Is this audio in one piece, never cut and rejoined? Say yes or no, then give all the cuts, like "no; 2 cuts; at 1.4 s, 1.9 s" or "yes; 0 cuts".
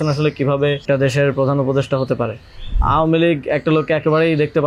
no; 2 cuts; at 0.8 s, 2.8 s